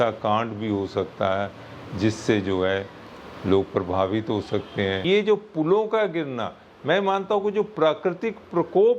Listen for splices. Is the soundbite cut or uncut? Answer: cut